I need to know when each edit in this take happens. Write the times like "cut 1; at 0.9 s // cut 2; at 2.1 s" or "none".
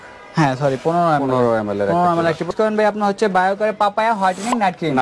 cut 1; at 2.5 s